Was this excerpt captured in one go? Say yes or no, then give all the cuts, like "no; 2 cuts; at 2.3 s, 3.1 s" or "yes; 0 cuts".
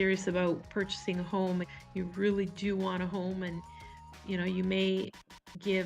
no; 1 cut; at 1.7 s